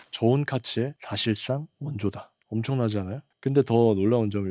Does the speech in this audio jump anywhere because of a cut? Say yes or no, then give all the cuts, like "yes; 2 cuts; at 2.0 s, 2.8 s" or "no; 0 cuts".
yes; 3 cuts; at 1.0 s, 2.2 s, 3.3 s